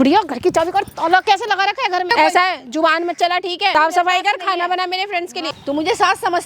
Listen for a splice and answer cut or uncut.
cut